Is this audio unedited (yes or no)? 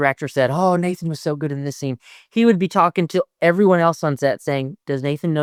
yes